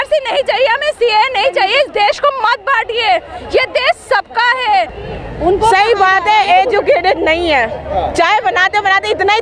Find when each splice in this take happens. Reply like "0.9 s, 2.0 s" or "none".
5.0 s